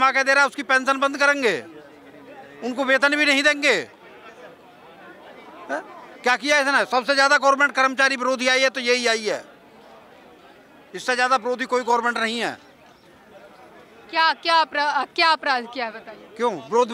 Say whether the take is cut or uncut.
uncut